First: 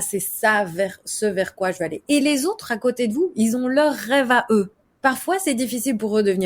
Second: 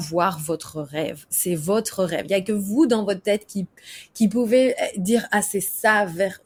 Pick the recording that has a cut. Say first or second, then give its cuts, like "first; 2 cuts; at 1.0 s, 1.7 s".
first; 1 cut; at 4.8 s